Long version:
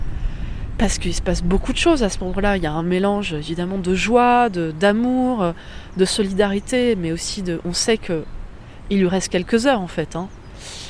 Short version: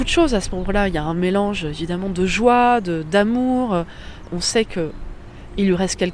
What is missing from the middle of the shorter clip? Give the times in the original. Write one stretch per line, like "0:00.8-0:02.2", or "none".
0:05.9-0:07.6